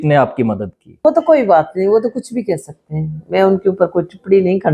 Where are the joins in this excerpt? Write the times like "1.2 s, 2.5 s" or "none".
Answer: 1.0 s